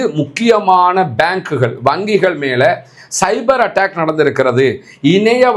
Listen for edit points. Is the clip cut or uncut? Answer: uncut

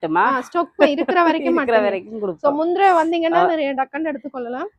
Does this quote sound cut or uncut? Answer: uncut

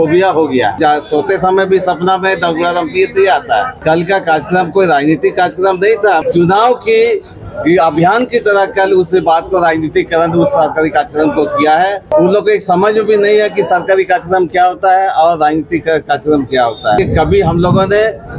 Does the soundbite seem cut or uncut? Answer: cut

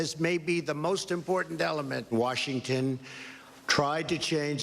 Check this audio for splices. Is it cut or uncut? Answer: cut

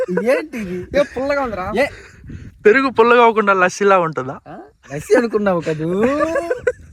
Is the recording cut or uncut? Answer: uncut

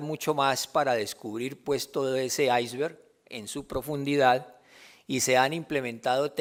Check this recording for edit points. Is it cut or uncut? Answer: uncut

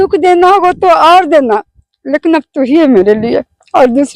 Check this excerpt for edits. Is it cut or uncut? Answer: uncut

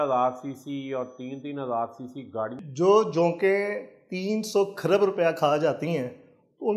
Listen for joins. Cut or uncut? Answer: cut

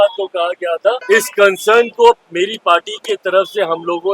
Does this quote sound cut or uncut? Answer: cut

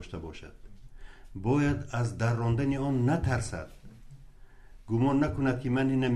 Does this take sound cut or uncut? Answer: uncut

